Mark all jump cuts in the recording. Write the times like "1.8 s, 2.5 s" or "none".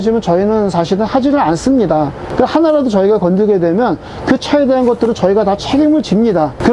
2.2 s